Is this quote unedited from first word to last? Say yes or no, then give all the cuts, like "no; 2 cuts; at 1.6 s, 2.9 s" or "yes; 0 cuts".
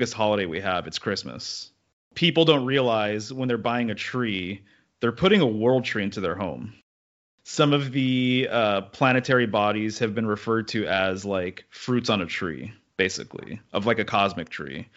no; 2 cuts; at 2.1 s, 7.0 s